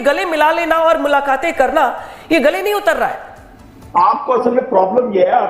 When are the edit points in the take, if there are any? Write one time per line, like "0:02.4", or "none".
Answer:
0:03.7